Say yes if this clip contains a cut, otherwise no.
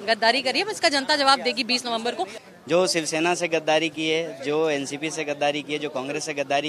yes